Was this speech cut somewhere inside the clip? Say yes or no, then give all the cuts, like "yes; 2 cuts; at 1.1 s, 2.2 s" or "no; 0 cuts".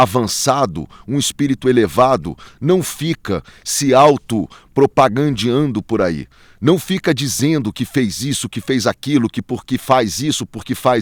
no; 0 cuts